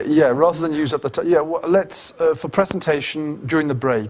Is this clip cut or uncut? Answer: uncut